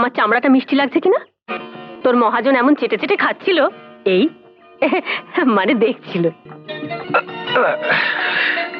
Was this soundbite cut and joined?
no; 0 cuts

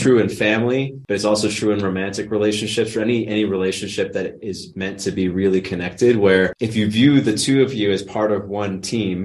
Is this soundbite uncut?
no; 2 cuts; at 1.0 s, 6.6 s

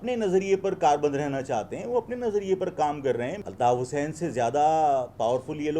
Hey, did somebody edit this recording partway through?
yes; 1 cut; at 3.4 s

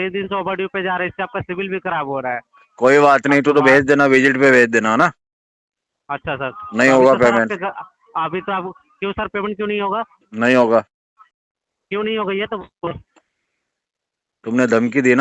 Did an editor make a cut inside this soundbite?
no; 0 cuts

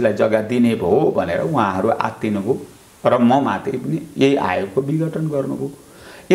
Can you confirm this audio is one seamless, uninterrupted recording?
yes; 0 cuts

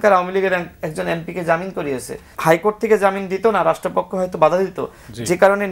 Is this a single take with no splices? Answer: no; 1 cut; at 2.3 s

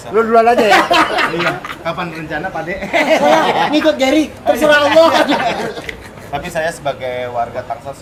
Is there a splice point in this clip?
no; 0 cuts

